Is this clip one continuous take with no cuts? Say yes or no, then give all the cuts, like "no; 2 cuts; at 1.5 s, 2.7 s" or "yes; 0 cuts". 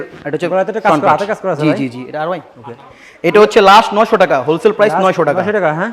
yes; 0 cuts